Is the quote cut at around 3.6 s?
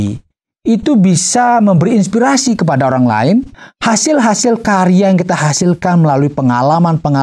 yes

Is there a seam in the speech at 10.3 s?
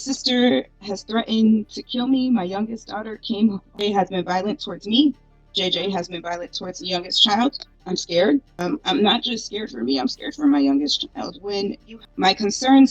no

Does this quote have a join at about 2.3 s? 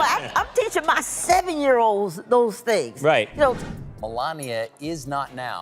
no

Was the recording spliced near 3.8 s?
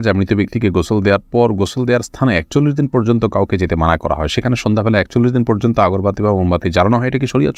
no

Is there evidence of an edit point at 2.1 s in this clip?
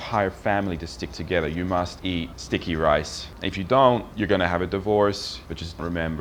yes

